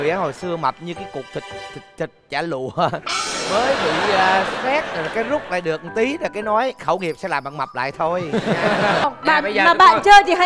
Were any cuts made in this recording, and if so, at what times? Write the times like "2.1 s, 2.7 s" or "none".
9.1 s